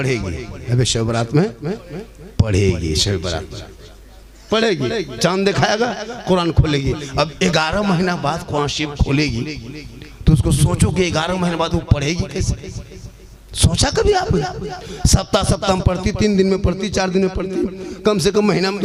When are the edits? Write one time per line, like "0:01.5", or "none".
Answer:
none